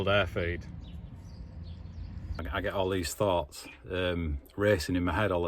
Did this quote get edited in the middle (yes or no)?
yes